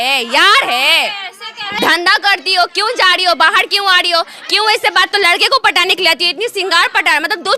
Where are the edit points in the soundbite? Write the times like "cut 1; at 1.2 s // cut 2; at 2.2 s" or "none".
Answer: cut 1; at 1.7 s // cut 2; at 5.1 s